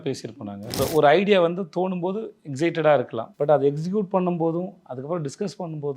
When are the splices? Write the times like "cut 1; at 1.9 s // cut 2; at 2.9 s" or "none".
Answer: cut 1; at 0.8 s // cut 2; at 3.2 s